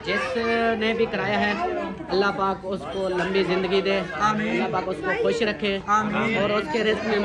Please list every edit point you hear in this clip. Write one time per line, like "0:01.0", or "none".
none